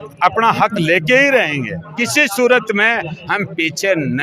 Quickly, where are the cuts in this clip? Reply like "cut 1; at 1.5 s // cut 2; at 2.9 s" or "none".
cut 1; at 1.8 s